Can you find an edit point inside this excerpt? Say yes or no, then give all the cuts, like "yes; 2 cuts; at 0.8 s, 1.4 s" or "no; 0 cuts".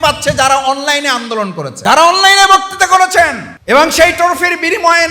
yes; 2 cuts; at 1.7 s, 3.5 s